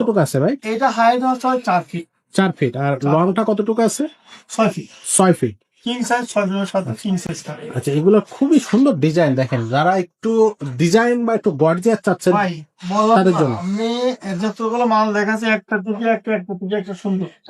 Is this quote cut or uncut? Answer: uncut